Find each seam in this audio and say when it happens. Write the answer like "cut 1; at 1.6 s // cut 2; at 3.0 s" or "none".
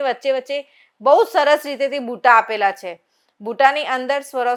none